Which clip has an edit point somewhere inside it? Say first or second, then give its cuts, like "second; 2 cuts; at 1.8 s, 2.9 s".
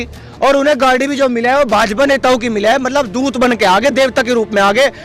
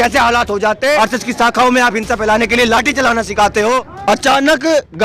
second; 2 cuts; at 1.0 s, 3.9 s